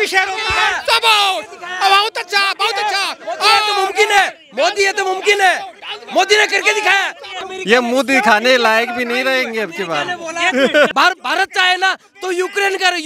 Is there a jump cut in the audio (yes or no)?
yes